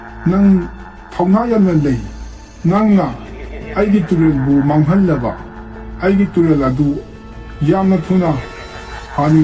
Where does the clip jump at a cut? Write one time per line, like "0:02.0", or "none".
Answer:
none